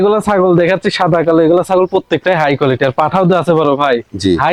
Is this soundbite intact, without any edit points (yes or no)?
yes